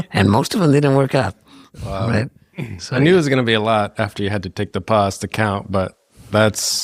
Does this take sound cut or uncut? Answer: uncut